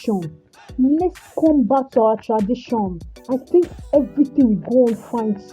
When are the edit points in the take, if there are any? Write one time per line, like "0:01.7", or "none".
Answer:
0:03.1